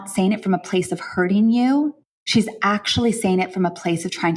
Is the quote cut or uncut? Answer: uncut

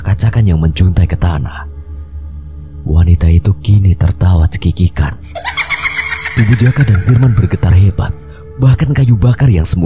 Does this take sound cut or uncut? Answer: uncut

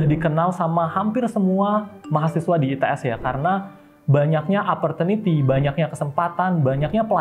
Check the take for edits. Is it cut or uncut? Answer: uncut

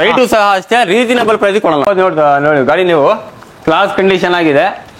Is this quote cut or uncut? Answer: cut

